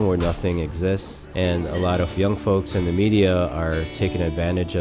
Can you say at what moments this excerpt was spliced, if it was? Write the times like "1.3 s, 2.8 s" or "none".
1.2 s, 2.1 s